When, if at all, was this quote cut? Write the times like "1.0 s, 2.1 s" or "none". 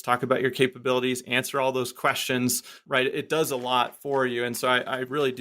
2.7 s